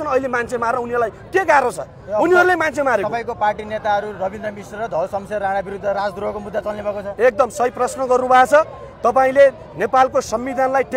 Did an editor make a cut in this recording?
no; 0 cuts

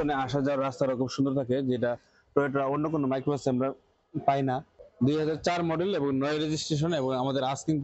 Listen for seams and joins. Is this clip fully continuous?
no; 1 cut; at 4.8 s

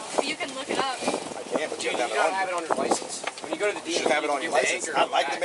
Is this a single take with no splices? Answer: yes; 0 cuts

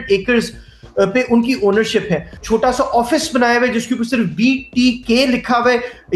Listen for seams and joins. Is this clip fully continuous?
no; 1 cut; at 2.4 s

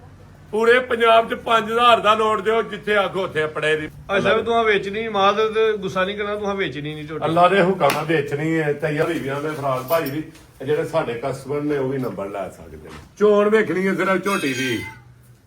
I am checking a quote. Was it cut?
yes; 3 cuts; at 3.9 s, 9.0 s, 13.0 s

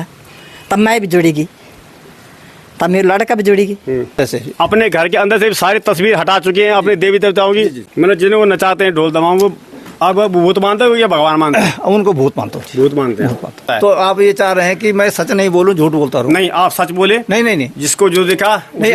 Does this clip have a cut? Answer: yes; 3 cuts; at 4.2 s, 7.8 s, 13.6 s

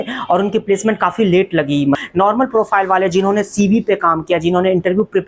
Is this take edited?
yes; 1 cut; at 2.0 s

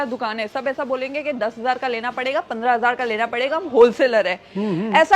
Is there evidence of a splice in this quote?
no; 0 cuts

